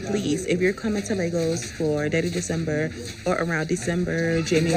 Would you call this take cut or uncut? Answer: uncut